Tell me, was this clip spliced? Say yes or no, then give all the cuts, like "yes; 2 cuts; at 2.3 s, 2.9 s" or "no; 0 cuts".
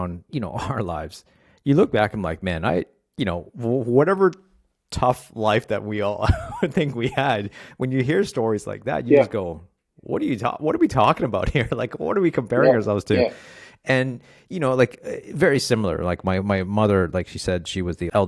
no; 0 cuts